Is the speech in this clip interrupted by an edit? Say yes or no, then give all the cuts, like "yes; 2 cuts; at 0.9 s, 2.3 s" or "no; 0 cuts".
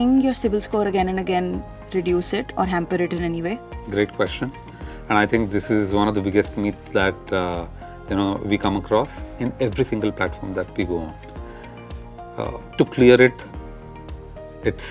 no; 0 cuts